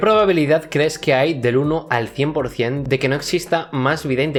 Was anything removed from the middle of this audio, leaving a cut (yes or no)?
no